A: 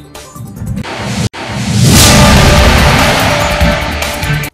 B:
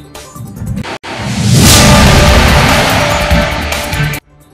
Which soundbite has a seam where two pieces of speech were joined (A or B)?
B